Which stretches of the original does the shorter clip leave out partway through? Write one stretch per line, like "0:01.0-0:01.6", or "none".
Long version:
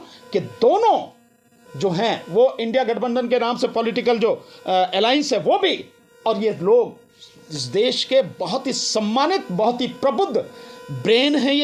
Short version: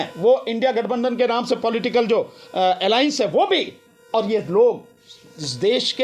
none